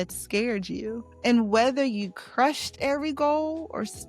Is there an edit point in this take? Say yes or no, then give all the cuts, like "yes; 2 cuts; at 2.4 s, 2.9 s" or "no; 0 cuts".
yes; 1 cut; at 1.1 s